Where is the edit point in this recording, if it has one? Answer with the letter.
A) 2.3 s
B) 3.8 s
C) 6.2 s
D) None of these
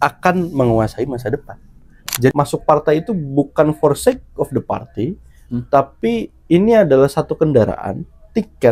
A